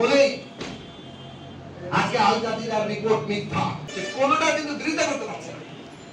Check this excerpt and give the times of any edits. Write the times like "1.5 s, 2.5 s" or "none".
3.9 s